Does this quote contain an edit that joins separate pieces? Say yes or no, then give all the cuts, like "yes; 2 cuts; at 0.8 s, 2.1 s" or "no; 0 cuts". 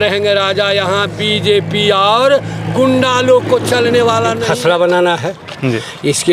yes; 1 cut; at 4.4 s